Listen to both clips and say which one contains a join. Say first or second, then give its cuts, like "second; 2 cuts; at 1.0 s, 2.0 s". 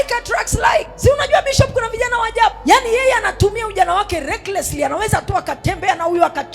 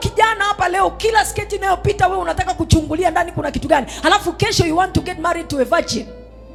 first; 2 cuts; at 0.9 s, 2.6 s